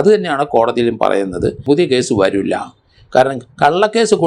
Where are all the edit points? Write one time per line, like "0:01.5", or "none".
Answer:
0:01.6